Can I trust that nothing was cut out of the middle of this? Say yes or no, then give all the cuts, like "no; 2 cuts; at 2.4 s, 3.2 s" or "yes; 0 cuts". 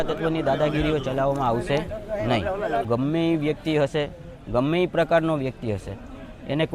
no; 1 cut; at 2.9 s